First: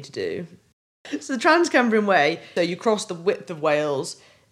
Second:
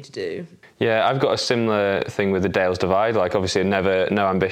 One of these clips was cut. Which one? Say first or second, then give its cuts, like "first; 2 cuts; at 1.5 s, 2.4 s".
first; 2 cuts; at 0.9 s, 2.4 s